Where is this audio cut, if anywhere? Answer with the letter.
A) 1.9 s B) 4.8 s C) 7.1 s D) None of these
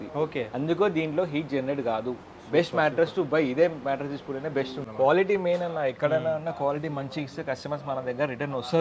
B